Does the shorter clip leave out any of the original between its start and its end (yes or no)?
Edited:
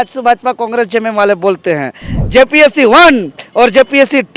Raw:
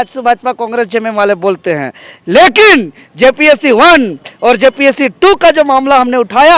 yes